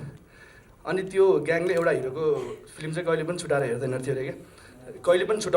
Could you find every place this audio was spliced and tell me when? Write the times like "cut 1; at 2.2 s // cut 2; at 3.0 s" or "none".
none